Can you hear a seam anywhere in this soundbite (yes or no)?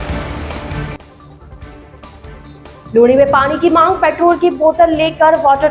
yes